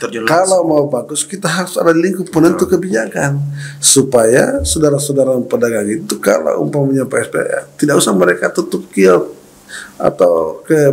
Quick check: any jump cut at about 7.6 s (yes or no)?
no